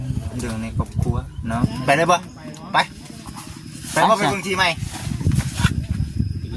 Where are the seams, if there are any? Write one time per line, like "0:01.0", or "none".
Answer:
0:01.7

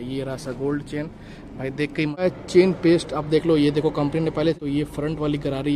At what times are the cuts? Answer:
0:02.2
0:04.5

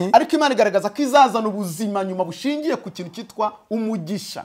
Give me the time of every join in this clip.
none

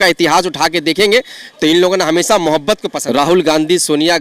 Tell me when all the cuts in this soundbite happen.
0:02.9

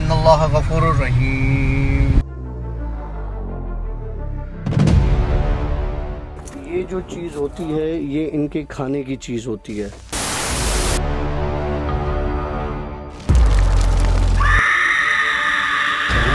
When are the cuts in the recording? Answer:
none

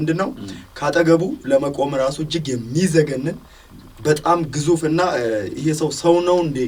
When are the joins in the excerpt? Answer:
none

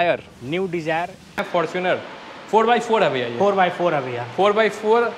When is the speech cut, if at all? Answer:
0:01.4

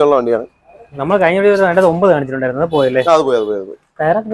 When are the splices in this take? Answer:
none

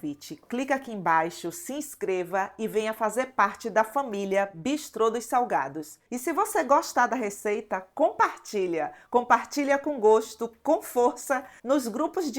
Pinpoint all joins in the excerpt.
none

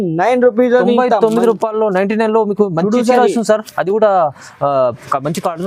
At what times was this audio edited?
none

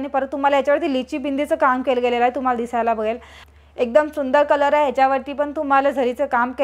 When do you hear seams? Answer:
0:03.3

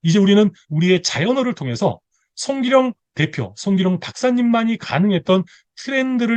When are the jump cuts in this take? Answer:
none

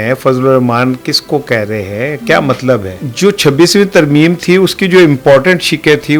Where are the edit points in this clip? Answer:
0:03.0

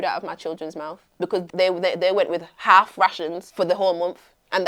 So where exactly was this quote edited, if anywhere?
0:01.5
0:03.4

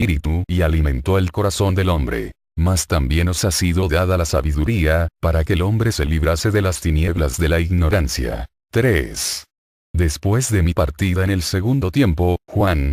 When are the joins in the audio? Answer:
0:08.6

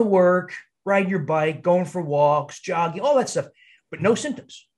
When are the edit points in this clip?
none

